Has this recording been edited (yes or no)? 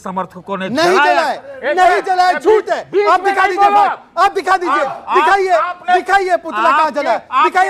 no